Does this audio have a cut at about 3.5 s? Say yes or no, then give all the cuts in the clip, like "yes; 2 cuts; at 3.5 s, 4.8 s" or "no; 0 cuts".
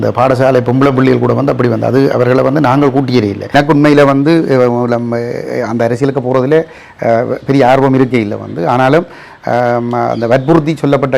yes; 1 cut; at 3.5 s